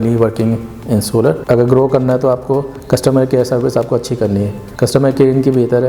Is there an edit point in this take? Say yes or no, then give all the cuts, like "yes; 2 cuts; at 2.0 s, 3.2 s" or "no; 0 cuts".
yes; 3 cuts; at 1.4 s, 2.7 s, 4.6 s